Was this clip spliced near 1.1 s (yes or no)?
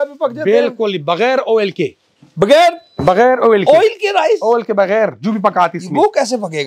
no